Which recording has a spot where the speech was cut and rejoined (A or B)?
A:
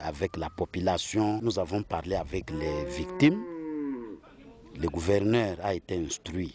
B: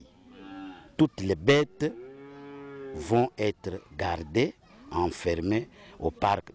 A